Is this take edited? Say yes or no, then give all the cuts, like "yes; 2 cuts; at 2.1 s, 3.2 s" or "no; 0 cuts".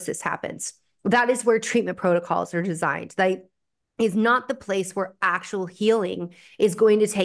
no; 0 cuts